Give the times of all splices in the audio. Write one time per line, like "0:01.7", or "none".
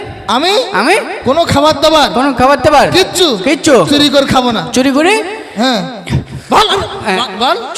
none